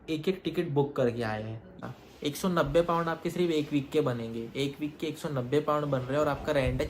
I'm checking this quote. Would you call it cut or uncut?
cut